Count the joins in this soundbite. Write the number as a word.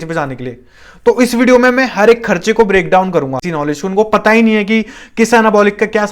one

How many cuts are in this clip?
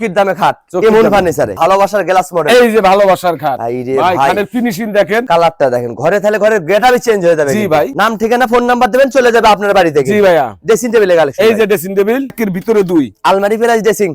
four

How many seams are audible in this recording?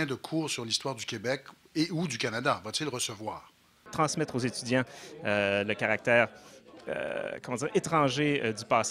one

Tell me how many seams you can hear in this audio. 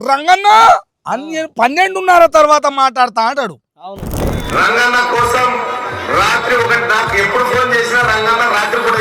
zero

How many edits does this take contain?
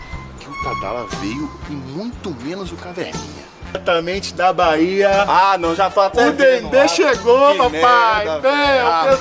one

